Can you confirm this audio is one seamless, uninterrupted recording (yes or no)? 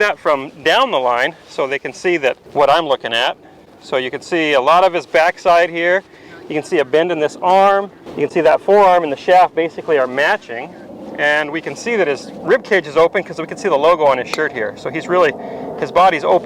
no